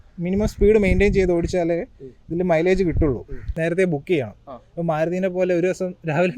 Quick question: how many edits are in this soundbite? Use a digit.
1